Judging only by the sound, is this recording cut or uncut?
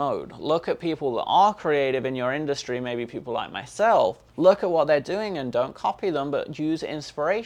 cut